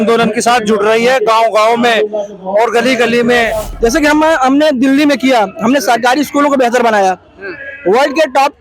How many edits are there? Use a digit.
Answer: 1